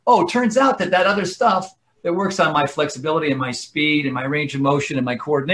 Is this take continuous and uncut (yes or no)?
yes